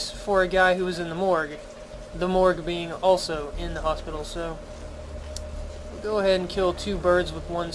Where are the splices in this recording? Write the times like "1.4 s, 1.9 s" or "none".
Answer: none